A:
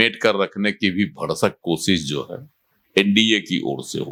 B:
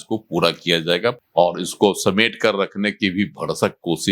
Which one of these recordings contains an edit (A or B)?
B